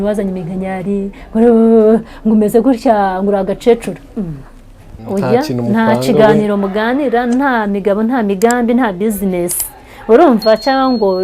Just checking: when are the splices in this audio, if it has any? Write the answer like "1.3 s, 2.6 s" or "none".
5.0 s